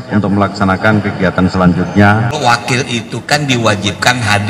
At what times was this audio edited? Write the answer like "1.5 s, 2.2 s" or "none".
2.4 s

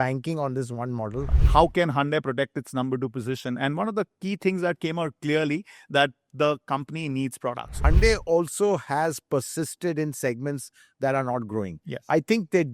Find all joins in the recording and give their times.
1.3 s, 7.8 s

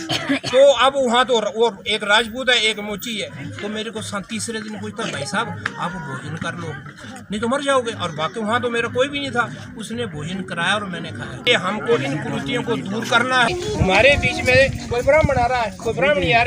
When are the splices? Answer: 11.5 s, 13.5 s

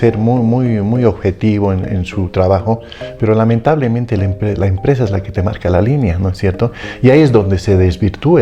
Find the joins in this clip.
none

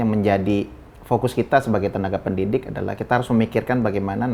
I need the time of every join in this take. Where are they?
none

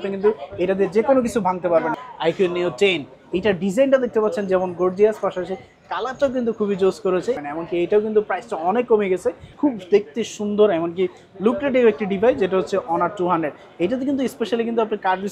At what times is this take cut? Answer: 1.9 s, 7.4 s, 9.5 s

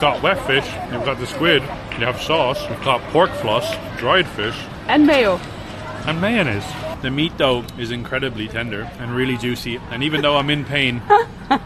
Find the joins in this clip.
1.7 s, 2.7 s, 3.9 s, 7.0 s, 7.7 s, 8.9 s

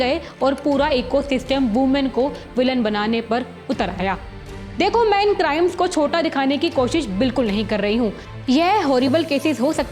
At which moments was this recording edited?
none

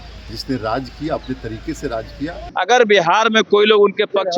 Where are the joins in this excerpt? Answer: 2.4 s

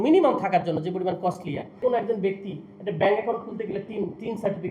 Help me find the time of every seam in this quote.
1.8 s

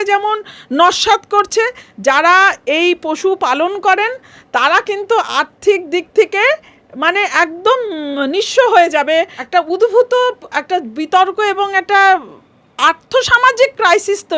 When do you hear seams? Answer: 1.9 s, 9.4 s

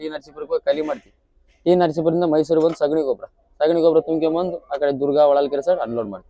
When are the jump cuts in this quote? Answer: none

